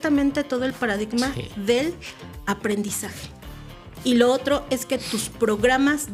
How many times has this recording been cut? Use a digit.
0